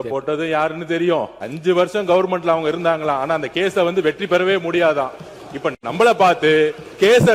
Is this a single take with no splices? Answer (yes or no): no